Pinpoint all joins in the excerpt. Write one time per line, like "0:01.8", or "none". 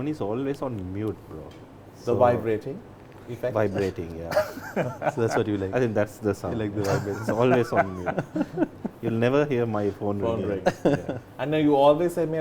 none